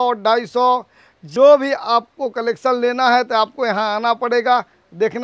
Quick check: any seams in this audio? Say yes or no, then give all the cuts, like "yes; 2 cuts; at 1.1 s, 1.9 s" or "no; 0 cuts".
yes; 1 cut; at 1.3 s